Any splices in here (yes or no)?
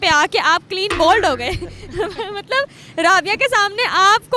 no